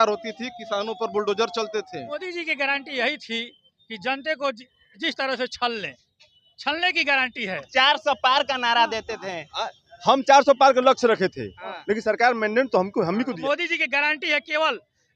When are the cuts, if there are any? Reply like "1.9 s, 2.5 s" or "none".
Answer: 2.2 s, 7.7 s, 13.4 s